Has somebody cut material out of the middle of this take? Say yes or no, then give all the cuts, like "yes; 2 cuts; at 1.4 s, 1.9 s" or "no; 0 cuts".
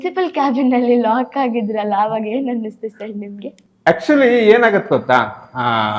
no; 0 cuts